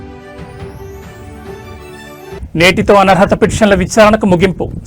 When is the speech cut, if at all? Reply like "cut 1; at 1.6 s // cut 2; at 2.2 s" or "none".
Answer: none